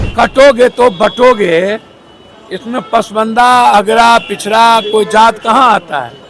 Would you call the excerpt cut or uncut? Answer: uncut